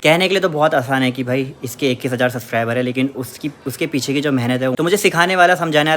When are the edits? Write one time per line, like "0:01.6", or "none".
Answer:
0:04.7

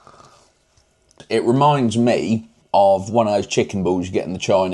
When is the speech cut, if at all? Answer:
0:01.1
0:02.5

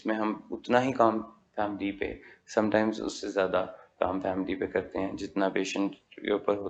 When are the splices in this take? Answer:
none

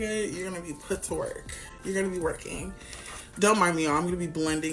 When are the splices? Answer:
none

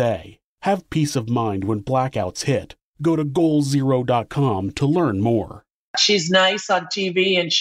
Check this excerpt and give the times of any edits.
0:05.9

